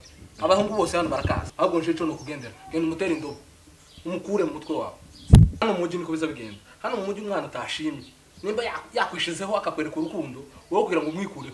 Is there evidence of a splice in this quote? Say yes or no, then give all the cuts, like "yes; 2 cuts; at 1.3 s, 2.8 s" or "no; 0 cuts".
yes; 2 cuts; at 1.5 s, 5.6 s